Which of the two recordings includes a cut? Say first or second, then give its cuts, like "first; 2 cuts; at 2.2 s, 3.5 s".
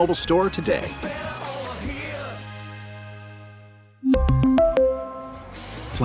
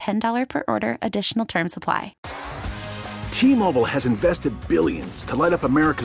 second; 1 cut; at 2.2 s